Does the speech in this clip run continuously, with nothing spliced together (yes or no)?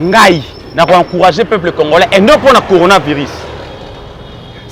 yes